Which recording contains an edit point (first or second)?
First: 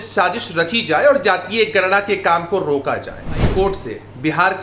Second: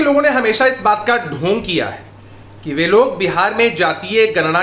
first